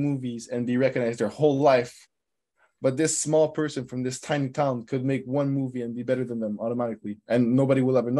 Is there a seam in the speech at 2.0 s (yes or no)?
no